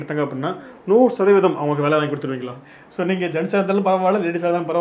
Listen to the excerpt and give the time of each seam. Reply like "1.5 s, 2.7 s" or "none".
2.4 s